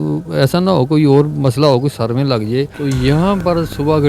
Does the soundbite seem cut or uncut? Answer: cut